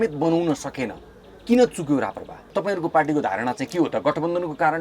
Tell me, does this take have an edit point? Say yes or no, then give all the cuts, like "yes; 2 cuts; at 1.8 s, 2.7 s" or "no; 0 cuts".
yes; 1 cut; at 2.5 s